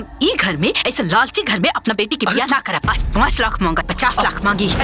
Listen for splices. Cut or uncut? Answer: cut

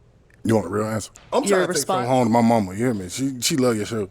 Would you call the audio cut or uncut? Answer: cut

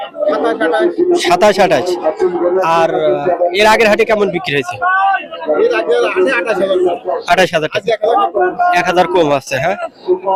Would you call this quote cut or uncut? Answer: uncut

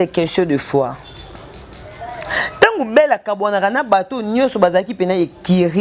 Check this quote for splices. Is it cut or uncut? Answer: uncut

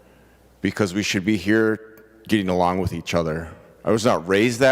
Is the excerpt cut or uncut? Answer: uncut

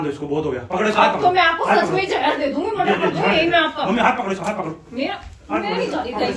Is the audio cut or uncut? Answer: uncut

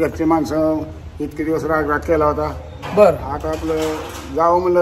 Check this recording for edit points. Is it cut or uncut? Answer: uncut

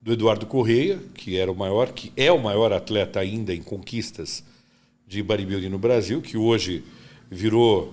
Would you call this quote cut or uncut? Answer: uncut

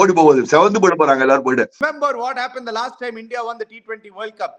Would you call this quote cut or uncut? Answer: cut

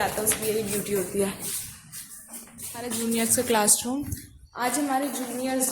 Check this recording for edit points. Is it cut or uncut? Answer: cut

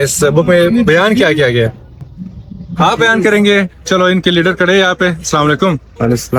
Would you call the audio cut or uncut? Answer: uncut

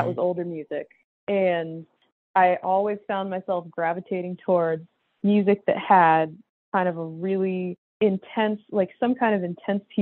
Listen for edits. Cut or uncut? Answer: cut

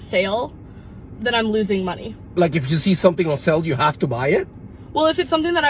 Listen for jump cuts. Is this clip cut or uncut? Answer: cut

